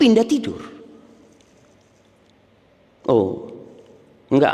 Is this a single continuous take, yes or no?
yes